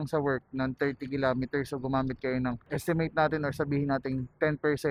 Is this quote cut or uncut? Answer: uncut